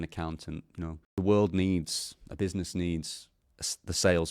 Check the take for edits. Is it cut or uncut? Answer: cut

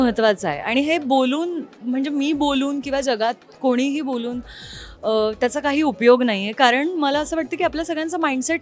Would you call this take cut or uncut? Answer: uncut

